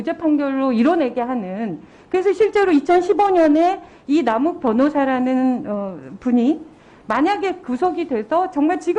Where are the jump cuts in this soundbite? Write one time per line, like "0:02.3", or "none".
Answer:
none